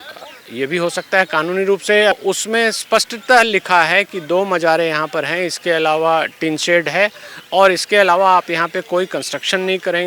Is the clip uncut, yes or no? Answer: no